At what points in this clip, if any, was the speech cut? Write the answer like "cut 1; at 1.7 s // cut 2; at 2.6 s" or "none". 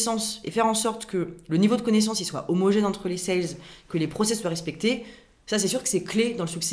none